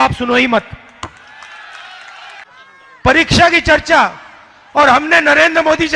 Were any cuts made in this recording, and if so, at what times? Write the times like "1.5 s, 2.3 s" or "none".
2.5 s